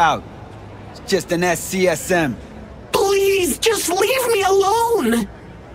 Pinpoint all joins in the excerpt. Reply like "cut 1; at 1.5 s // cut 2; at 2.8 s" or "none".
none